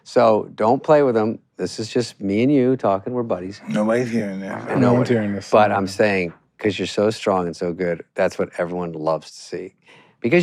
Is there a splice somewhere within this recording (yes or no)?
no